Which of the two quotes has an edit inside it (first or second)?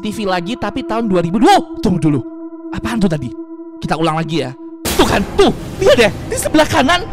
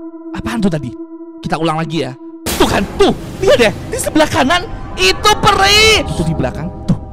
second